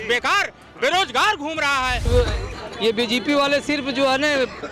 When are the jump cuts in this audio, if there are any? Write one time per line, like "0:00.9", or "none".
0:02.0